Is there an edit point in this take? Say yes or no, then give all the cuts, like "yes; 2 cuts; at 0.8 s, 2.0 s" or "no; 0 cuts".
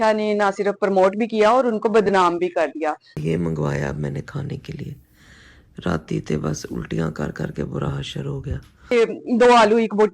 yes; 1 cut; at 8.9 s